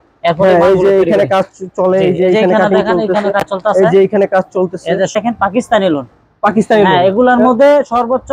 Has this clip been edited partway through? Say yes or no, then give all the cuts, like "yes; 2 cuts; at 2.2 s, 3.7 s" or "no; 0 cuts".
yes; 1 cut; at 5.1 s